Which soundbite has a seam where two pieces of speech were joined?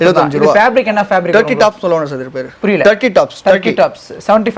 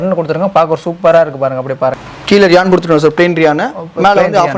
second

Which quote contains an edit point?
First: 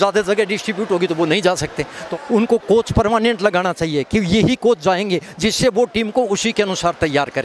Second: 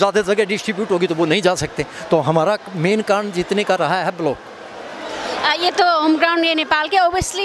first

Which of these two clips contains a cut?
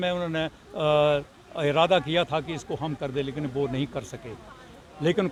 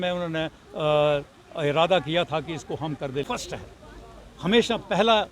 second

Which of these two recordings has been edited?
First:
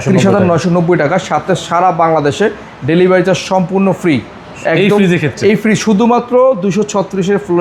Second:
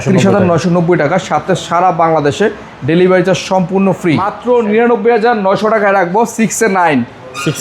second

